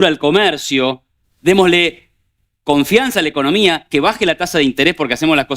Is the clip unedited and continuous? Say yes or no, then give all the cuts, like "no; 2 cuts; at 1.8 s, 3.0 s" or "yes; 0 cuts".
yes; 0 cuts